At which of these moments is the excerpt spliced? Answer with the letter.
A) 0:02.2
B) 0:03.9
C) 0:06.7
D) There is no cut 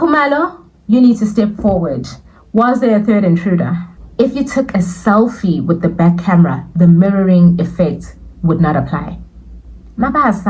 B